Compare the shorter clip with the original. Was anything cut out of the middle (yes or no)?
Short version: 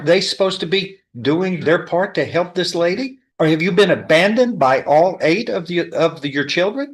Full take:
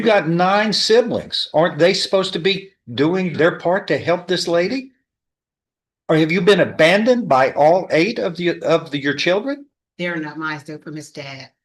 yes